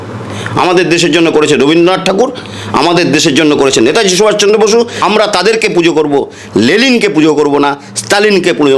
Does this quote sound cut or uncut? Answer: cut